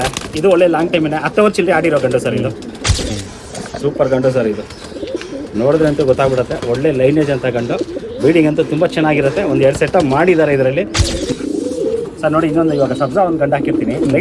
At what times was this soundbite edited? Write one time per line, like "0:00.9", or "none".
0:03.1
0:11.2

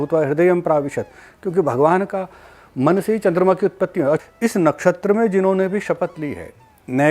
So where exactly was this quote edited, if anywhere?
0:04.2

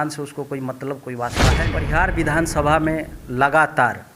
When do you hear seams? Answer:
0:01.6

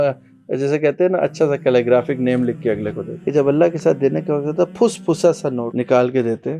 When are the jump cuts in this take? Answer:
0:03.1
0:05.7

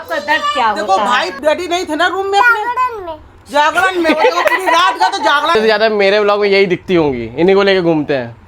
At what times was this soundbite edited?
0:01.4
0:05.5

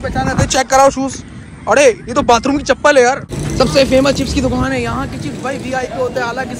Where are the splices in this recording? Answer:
0:03.4

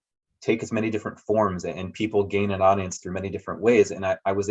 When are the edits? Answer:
none

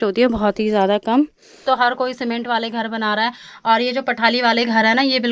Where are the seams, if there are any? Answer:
0:01.5

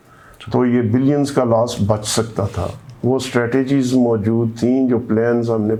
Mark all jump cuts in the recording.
none

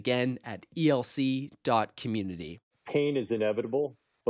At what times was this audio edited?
0:02.6

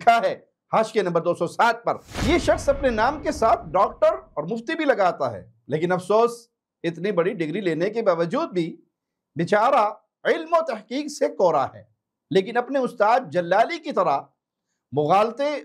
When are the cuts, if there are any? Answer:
0:02.1

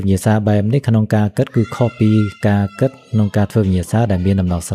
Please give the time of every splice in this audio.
none

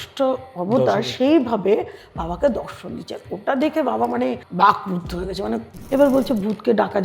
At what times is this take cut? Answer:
0:04.4
0:05.7

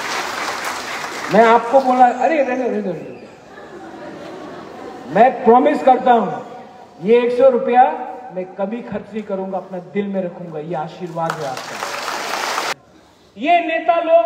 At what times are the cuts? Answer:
0:12.7

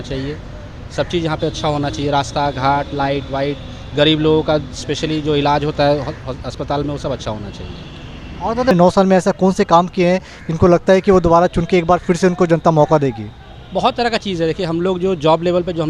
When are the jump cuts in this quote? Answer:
0:08.7

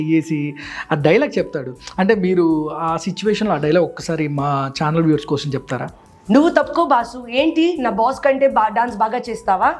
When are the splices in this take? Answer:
0:06.0

